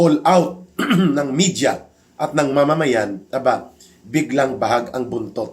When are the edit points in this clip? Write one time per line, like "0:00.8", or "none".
none

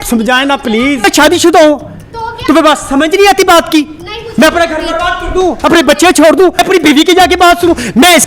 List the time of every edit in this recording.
0:01.0
0:06.6

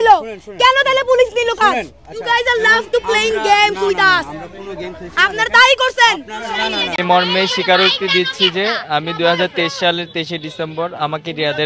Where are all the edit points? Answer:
0:06.9

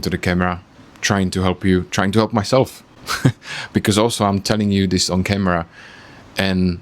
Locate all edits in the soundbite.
none

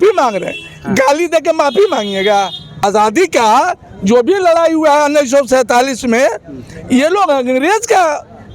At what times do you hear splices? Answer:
0:02.8

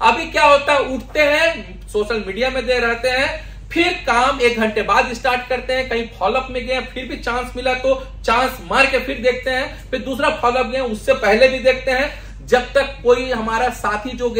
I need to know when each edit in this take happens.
none

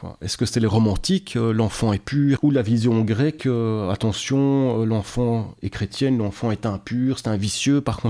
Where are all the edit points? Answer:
0:02.4

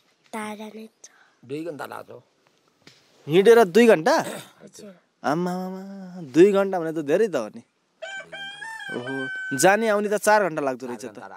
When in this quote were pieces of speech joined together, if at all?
none

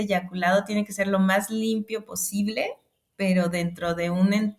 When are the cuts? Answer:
none

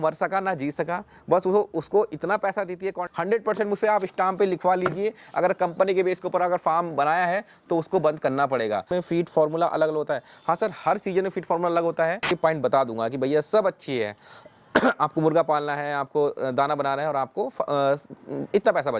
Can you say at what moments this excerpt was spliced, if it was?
0:03.0
0:08.9
0:12.3

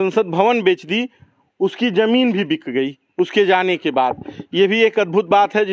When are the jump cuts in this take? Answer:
none

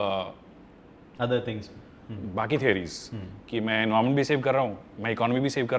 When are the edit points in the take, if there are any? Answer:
none

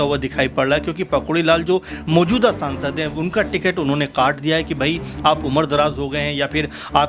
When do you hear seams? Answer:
none

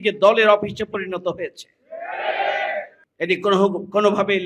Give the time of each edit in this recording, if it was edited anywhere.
0:03.0

